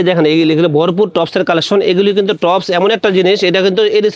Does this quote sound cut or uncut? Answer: uncut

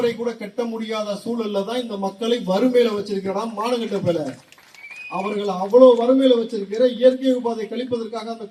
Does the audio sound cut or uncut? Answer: uncut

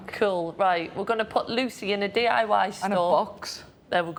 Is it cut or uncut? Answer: uncut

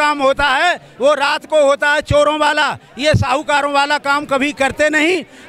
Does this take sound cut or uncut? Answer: uncut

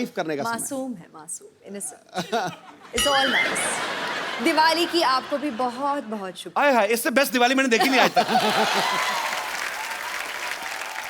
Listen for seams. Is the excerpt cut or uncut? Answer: uncut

